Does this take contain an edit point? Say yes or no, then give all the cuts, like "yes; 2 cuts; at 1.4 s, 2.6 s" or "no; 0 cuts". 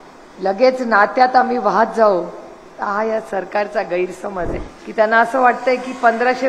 yes; 1 cut; at 4.5 s